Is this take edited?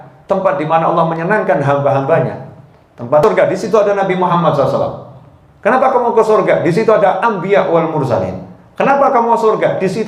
yes; 1 cut; at 3.2 s

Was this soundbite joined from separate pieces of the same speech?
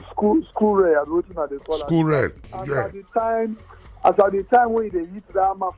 yes; 1 cut; at 2.5 s

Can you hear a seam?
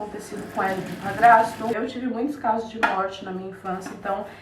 yes; 1 cut; at 1.8 s

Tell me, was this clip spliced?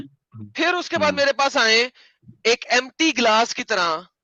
no; 0 cuts

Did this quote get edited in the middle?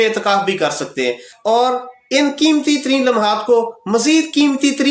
yes; 1 cut; at 1.3 s

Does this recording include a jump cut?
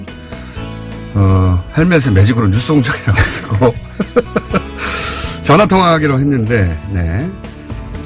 no; 0 cuts

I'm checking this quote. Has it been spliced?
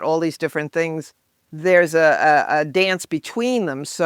no; 0 cuts

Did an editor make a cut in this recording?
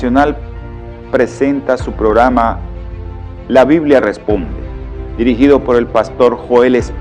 yes; 1 cut; at 1.4 s

